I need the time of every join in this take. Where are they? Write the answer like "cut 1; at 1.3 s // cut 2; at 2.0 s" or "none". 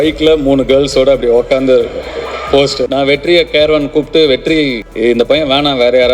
cut 1; at 2.8 s // cut 2; at 4.8 s